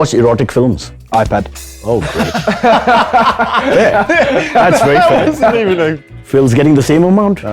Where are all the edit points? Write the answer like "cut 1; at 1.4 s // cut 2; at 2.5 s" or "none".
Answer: cut 1; at 0.9 s // cut 2; at 6.1 s

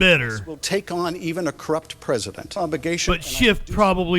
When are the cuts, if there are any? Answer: cut 1; at 2.5 s

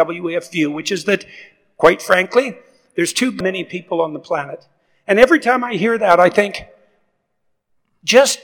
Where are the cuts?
cut 1; at 3.4 s

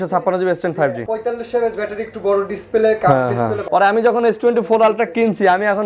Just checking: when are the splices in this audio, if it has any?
cut 1; at 1.0 s // cut 2; at 3.6 s

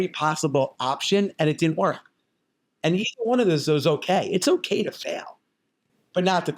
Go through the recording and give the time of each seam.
cut 1; at 5.4 s

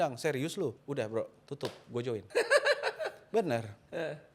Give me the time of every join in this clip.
cut 1; at 0.8 s // cut 2; at 2.3 s

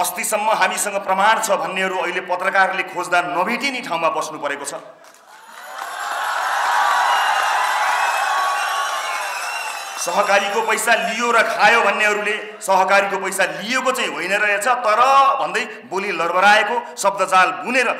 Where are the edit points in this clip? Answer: none

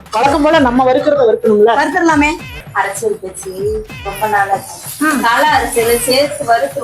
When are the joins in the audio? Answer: cut 1; at 2.6 s

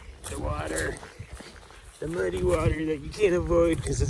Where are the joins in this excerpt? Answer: none

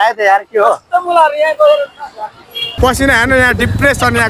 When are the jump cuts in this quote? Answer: cut 1; at 2.8 s

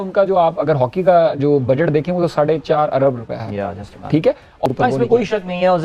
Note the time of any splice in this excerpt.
cut 1; at 4.6 s

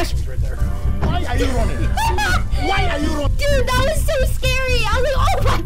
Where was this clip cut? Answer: none

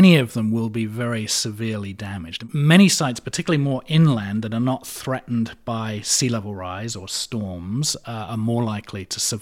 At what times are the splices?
cut 1; at 2.4 s

